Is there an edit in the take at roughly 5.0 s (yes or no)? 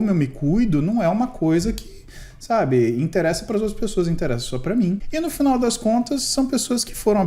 yes